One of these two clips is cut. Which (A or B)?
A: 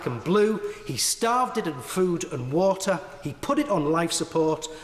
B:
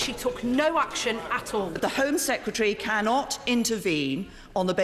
B